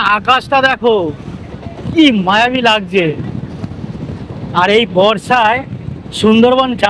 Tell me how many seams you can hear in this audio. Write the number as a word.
zero